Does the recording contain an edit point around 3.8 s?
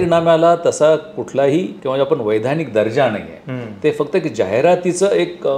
no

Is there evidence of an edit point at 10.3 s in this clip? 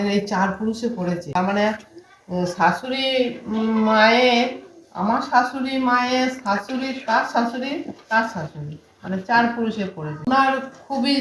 yes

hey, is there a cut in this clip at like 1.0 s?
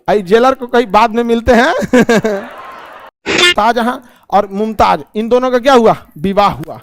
no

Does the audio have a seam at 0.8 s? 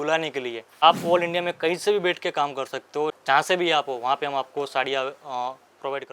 yes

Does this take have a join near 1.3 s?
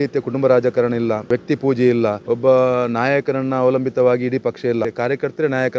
yes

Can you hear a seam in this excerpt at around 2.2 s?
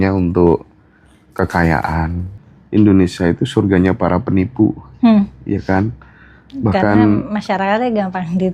yes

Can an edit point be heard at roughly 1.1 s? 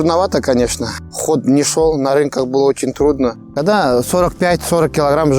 no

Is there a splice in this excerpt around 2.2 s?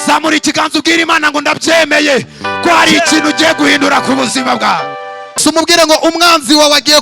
no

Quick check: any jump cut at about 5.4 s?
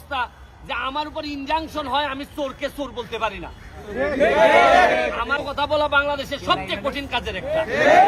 yes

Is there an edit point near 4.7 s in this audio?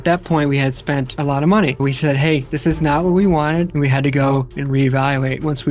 no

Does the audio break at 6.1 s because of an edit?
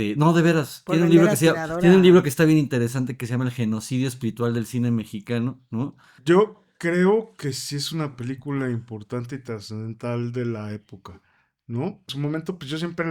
yes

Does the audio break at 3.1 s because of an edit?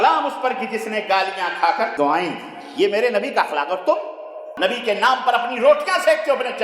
no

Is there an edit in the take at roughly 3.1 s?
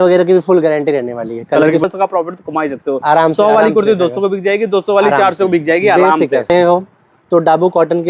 no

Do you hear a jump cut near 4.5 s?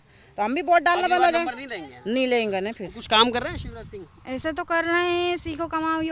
no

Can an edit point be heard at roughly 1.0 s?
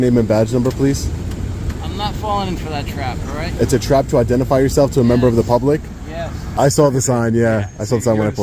no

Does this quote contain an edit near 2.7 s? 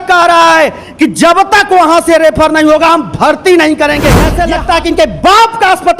no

